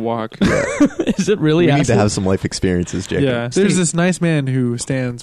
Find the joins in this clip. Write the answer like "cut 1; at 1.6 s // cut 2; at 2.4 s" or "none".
cut 1; at 3.5 s